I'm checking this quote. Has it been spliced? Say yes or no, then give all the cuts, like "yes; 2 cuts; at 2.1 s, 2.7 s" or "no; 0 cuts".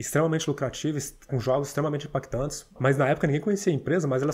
yes; 2 cuts; at 1.3 s, 2.7 s